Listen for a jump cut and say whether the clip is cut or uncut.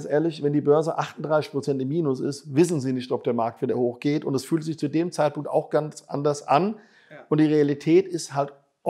uncut